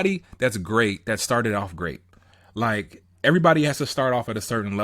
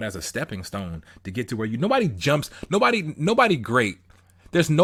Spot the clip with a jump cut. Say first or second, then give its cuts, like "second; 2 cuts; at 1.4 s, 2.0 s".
first; 1 cut; at 3.0 s